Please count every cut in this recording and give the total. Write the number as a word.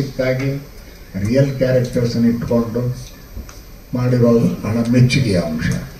zero